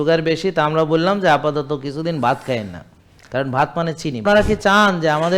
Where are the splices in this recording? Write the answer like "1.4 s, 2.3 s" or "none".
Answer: 4.2 s